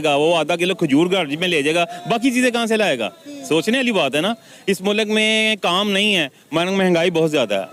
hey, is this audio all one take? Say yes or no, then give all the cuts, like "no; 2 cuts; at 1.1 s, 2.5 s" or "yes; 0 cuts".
yes; 0 cuts